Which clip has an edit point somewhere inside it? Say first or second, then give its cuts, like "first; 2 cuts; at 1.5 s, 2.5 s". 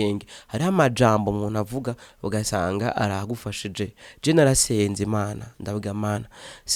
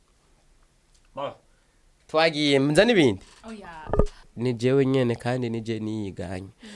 second; 1 cut; at 4.3 s